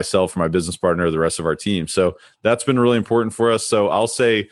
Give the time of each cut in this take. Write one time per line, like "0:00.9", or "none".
none